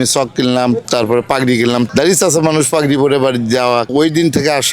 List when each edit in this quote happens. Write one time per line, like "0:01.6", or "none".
0:01.9
0:03.9